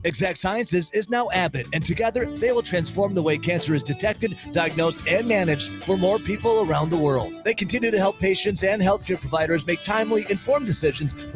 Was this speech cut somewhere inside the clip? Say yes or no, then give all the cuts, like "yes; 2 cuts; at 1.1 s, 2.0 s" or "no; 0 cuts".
no; 0 cuts